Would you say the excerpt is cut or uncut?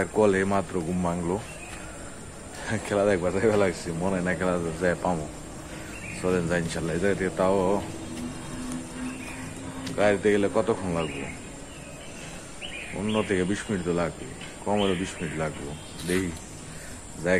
uncut